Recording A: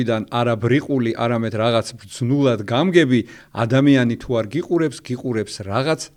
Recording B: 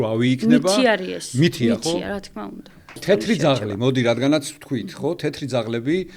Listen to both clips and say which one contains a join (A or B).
B